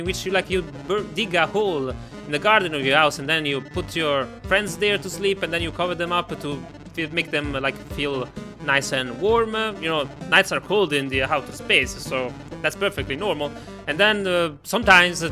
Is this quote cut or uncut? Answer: uncut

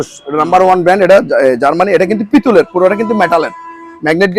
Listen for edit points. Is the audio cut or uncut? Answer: uncut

